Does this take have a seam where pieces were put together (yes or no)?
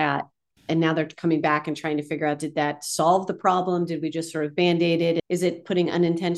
yes